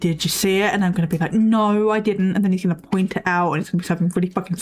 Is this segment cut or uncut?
uncut